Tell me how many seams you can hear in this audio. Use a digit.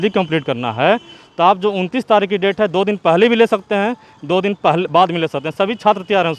0